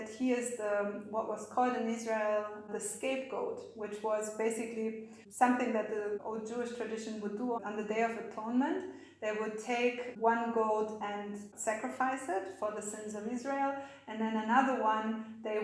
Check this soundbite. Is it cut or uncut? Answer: cut